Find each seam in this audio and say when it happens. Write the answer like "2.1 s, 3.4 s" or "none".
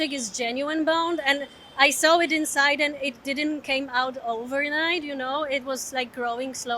none